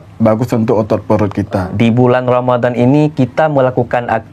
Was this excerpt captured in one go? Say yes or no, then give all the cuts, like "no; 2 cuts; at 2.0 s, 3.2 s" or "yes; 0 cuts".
no; 1 cut; at 1.7 s